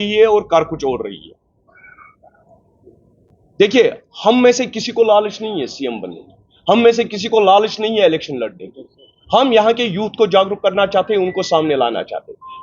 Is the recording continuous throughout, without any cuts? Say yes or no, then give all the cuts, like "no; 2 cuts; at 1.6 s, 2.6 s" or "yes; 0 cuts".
no; 1 cut; at 3.3 s